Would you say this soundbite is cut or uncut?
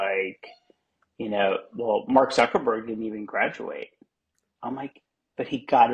uncut